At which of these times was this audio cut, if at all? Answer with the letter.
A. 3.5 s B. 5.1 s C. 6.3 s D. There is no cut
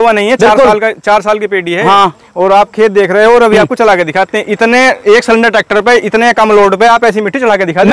D